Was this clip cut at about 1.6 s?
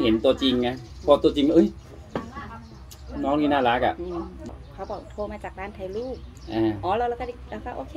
no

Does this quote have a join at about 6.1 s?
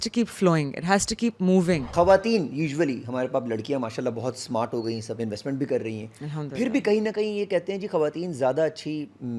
no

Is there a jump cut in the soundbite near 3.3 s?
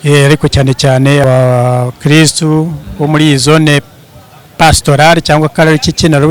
no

